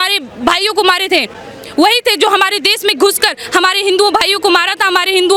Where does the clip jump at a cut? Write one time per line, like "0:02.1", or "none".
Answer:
none